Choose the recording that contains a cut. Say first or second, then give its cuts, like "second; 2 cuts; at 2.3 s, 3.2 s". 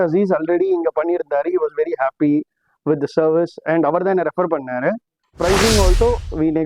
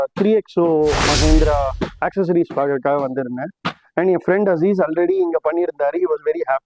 first; 1 cut; at 5.3 s